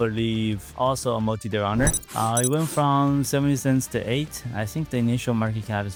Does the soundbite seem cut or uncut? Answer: uncut